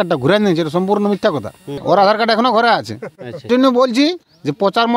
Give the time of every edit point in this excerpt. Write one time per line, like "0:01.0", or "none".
0:01.8
0:03.4